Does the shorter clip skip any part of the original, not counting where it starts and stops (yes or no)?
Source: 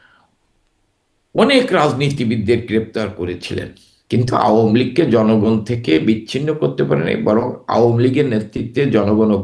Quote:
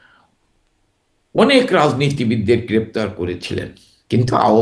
no